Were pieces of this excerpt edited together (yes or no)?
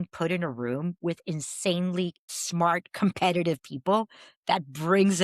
yes